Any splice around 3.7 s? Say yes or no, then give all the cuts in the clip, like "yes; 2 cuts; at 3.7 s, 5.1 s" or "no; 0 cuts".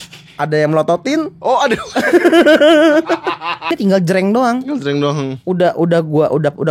yes; 1 cut; at 3.7 s